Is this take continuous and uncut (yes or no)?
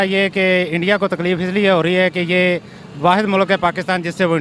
yes